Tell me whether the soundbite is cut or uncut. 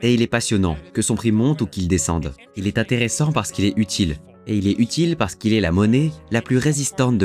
uncut